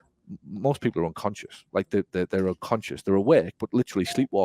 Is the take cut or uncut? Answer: uncut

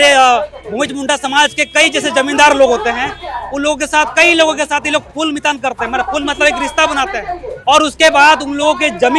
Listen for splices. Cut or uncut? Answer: uncut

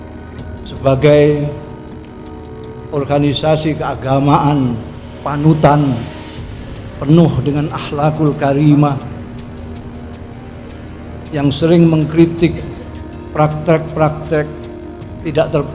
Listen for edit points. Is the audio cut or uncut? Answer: uncut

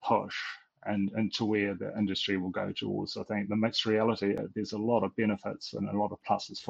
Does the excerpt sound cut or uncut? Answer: cut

